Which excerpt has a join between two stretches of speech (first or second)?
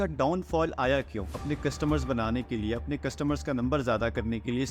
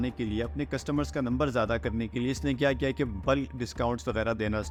first